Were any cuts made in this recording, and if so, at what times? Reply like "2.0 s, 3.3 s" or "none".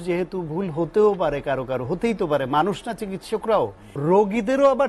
3.8 s